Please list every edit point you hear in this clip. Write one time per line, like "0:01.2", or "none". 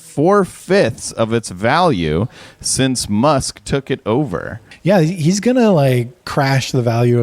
0:04.6